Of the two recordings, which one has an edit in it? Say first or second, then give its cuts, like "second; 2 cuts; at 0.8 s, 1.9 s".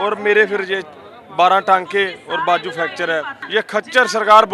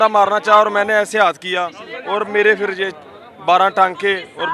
first; 1 cut; at 3.4 s